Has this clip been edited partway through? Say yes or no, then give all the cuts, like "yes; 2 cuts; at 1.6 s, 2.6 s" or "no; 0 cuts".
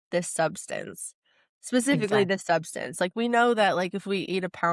no; 0 cuts